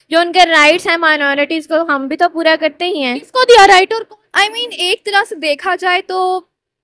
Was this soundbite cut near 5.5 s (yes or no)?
no